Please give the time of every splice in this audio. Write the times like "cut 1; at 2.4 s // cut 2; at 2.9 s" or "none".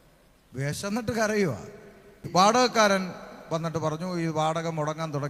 cut 1; at 2.3 s